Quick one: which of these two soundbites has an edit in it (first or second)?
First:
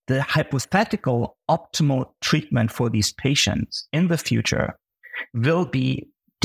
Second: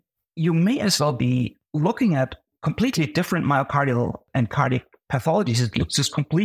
second